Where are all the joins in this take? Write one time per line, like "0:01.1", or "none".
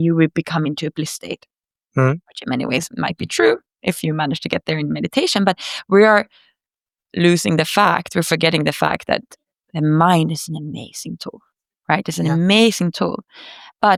none

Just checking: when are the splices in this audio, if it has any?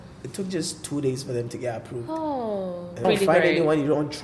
0:03.0

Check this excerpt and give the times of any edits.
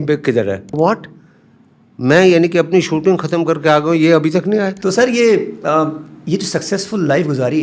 0:00.8
0:04.8

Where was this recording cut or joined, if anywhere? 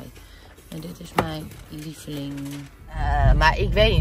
0:03.1

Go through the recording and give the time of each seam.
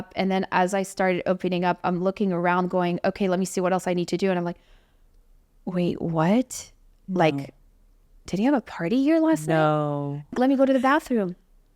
0:10.3

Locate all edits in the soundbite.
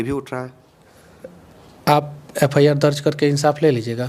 none

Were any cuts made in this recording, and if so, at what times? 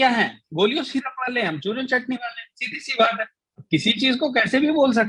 none

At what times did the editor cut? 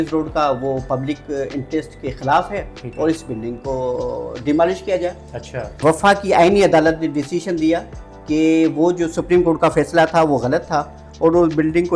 0:05.7

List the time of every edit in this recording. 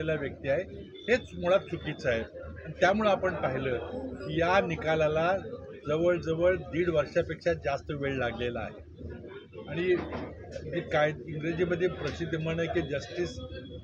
none

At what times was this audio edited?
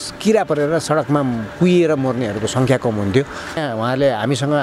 0:03.6

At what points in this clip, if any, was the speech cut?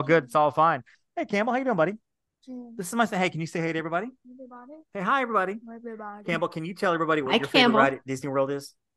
0:01.0

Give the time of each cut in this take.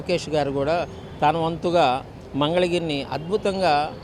none

